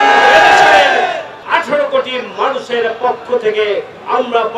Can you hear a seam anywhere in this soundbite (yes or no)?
yes